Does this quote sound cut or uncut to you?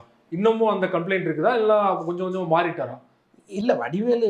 uncut